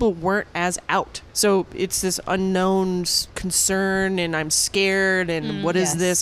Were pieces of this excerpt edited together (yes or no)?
no